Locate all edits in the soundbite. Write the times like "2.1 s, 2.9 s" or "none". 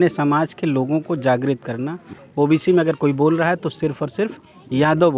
2.2 s